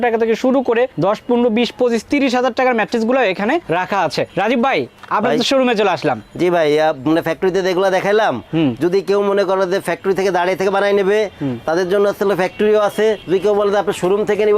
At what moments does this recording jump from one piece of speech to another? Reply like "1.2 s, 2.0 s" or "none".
none